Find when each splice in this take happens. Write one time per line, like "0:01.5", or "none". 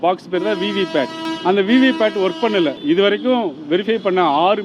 0:01.2
0:02.8